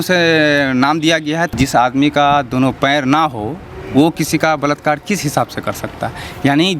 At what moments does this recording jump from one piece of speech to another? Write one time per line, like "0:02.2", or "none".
0:01.5